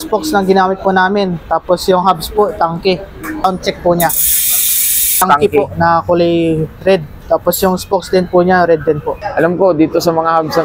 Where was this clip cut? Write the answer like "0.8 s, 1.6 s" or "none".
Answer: 3.4 s, 5.2 s, 9.2 s